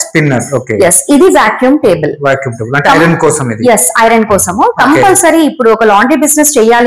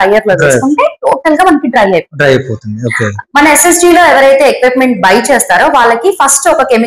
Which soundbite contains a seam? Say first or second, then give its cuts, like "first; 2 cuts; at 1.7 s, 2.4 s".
second; 1 cut; at 3.2 s